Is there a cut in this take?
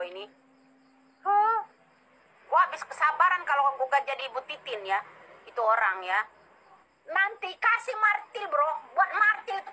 yes; 1 cut; at 6.9 s

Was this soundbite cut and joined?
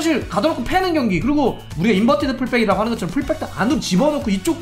yes; 1 cut; at 1.7 s

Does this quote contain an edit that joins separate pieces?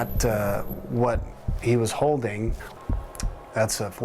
yes; 1 cut; at 2.6 s

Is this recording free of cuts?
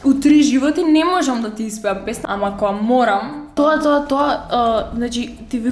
no; 2 cuts; at 2.1 s, 3.4 s

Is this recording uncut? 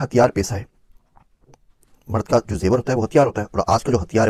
yes; 0 cuts

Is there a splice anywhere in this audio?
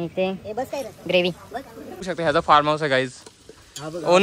yes; 1 cut; at 2.1 s

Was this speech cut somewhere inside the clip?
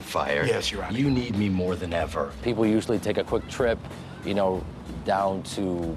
no; 0 cuts

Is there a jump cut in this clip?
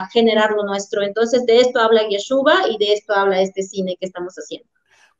no; 0 cuts

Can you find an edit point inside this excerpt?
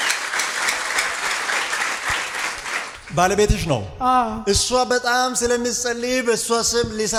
no; 0 cuts

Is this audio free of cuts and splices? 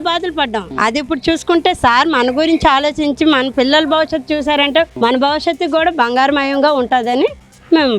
no; 1 cut; at 4.9 s

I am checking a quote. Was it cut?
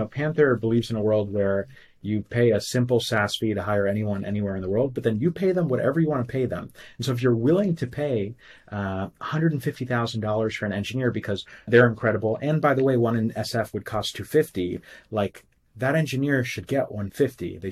yes; 1 cut; at 11.7 s

